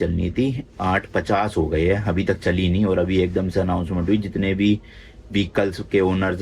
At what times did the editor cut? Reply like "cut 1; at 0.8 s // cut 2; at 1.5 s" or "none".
none